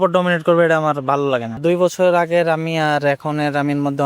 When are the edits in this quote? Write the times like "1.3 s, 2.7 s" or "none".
1.6 s